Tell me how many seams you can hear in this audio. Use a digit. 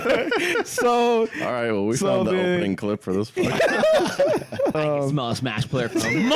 1